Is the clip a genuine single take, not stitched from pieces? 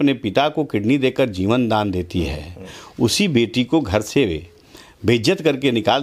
yes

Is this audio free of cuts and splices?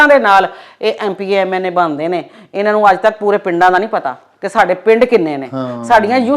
yes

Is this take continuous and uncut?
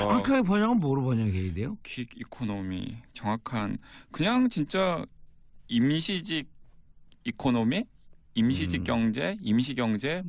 yes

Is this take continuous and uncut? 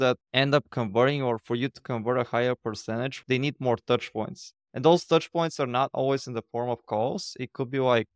yes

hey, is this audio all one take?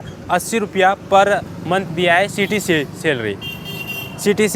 yes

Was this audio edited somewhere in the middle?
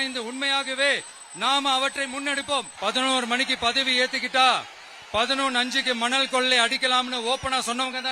yes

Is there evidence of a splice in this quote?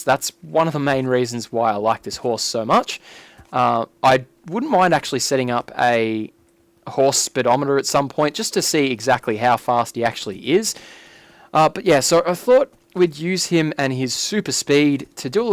yes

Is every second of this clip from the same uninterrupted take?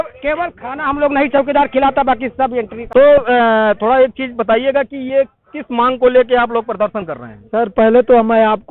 no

